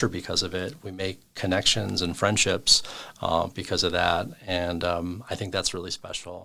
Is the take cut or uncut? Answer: uncut